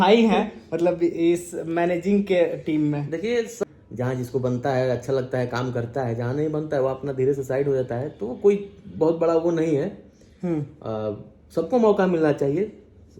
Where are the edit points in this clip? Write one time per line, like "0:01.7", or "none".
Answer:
0:03.6